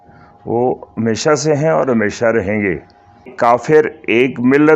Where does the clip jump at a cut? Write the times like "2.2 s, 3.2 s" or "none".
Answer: 1.0 s, 3.3 s

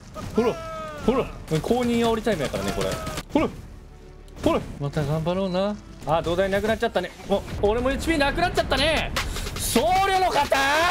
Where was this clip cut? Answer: 1.4 s, 3.2 s, 4.7 s, 5.9 s, 7.5 s

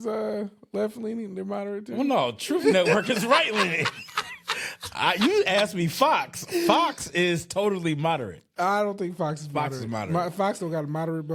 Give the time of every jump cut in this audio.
none

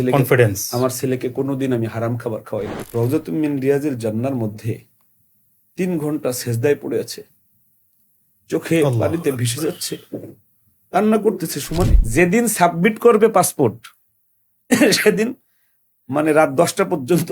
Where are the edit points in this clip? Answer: 2.8 s, 12.0 s

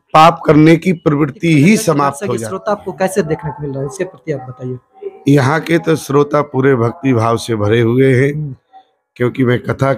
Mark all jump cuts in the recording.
2.3 s

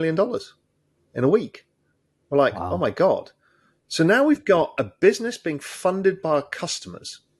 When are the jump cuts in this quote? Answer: none

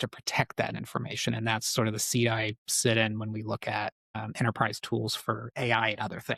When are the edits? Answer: none

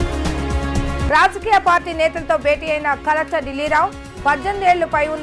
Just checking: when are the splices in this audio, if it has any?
1.1 s

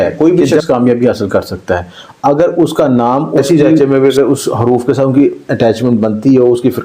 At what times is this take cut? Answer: 3.4 s

